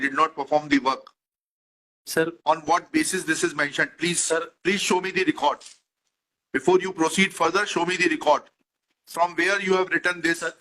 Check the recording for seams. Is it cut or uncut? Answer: uncut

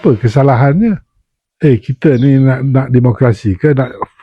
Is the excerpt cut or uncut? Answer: cut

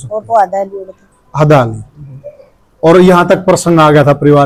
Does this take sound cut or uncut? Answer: uncut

